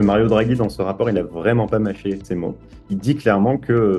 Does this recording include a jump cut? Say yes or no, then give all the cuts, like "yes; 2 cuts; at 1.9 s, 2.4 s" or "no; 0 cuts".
yes; 1 cut; at 2.4 s